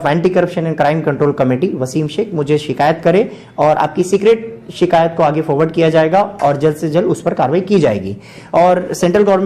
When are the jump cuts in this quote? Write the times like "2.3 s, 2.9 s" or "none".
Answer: none